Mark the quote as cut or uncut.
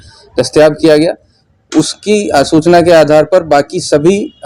uncut